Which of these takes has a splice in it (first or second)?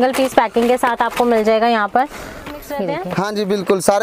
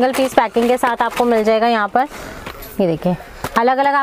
first